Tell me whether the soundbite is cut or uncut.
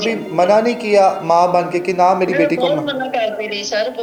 uncut